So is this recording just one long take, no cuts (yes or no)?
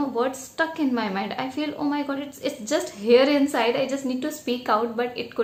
yes